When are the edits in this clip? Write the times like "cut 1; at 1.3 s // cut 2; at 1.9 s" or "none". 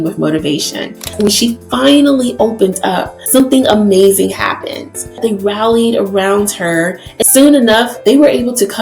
cut 1; at 1.1 s // cut 2; at 3.4 s // cut 3; at 5.4 s // cut 4; at 7.1 s // cut 5; at 8.1 s

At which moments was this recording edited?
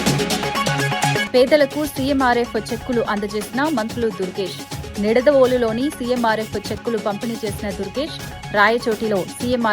cut 1; at 1.2 s

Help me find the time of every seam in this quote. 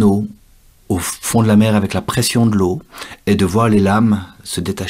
cut 1; at 1.2 s

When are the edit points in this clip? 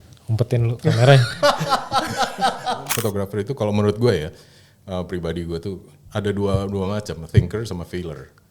cut 1; at 2.9 s

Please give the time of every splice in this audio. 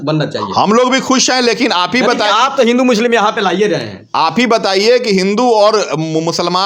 none

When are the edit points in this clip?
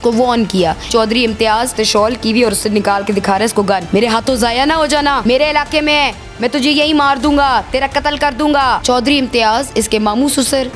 cut 1; at 0.8 s // cut 2; at 1.7 s // cut 3; at 3.8 s // cut 4; at 5.2 s // cut 5; at 8.8 s

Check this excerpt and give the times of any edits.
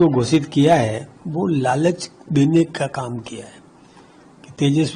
none

